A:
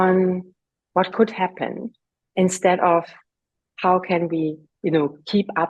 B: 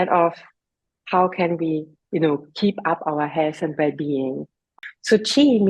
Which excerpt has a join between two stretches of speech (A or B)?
B